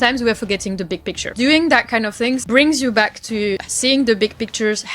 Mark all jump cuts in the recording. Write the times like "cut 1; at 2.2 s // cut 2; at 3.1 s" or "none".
cut 1; at 1.2 s // cut 2; at 2.4 s // cut 3; at 3.7 s